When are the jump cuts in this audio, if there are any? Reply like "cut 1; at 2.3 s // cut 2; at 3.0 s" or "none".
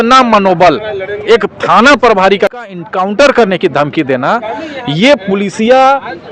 cut 1; at 2.5 s